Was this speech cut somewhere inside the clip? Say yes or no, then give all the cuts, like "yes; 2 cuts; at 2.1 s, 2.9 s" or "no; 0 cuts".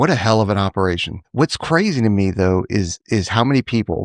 yes; 1 cut; at 1.1 s